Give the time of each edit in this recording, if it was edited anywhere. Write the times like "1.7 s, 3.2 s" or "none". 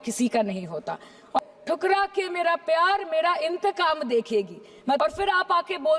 1.4 s, 5.0 s